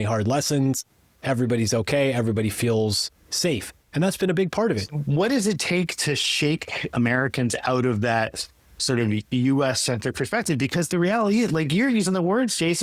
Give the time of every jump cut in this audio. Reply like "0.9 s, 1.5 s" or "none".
4.9 s